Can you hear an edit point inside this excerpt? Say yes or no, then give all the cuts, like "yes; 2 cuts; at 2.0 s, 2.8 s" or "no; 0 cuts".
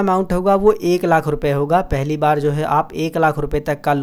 no; 0 cuts